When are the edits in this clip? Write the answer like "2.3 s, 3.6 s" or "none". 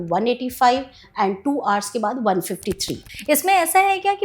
3.1 s